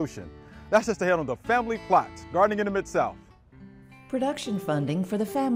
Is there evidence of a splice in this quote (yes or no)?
no